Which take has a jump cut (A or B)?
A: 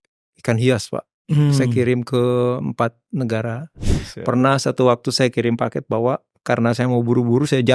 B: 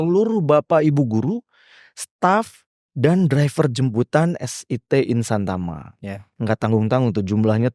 A